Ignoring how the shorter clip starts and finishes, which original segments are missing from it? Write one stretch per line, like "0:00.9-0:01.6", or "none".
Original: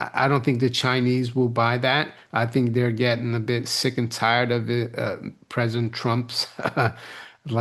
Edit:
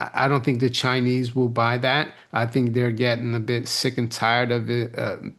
none